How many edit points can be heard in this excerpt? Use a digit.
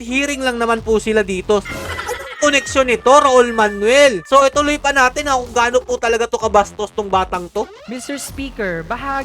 3